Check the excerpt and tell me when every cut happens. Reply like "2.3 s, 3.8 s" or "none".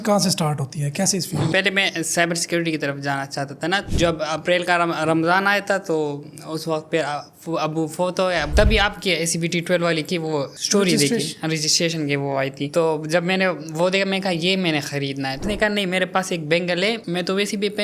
1.5 s, 3.9 s, 8.5 s, 10.5 s, 15.4 s